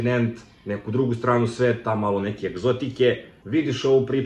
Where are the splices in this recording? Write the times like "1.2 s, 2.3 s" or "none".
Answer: 3.3 s